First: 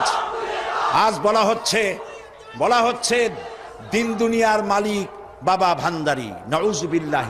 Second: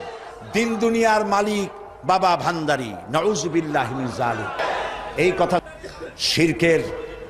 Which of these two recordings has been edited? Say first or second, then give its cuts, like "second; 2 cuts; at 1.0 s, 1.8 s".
second; 1 cut; at 5.6 s